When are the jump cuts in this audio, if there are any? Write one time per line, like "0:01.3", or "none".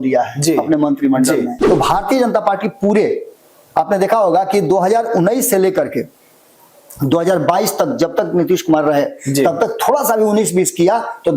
0:01.6